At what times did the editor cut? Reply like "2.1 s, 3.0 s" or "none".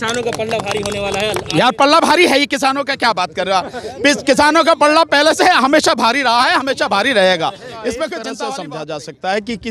8.3 s